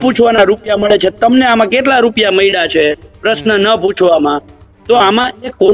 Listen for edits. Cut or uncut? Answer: uncut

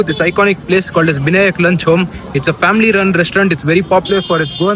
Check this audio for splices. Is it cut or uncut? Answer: uncut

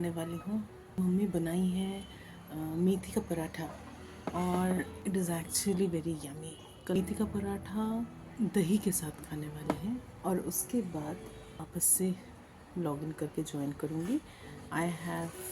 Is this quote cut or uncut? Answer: cut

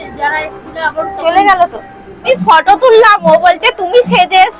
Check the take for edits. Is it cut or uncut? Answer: cut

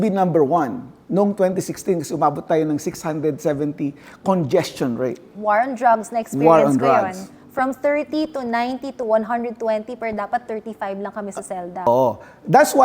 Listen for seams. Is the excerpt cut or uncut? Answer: cut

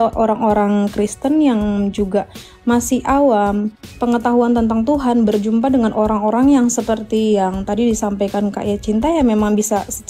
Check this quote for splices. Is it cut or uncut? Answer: uncut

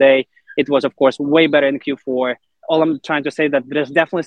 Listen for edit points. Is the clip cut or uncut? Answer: cut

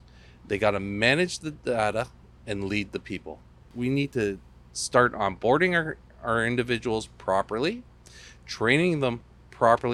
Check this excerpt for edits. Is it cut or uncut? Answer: cut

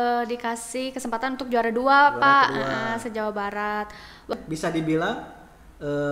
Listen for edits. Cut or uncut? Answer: cut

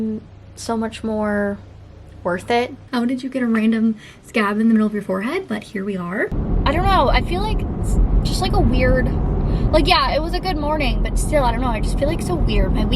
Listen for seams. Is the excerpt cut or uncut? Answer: cut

